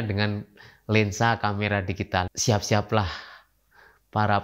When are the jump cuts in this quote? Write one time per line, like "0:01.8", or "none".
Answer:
0:02.3